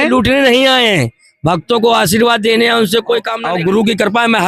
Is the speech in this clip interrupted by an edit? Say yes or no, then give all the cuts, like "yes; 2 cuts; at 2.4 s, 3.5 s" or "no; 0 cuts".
yes; 1 cut; at 3.4 s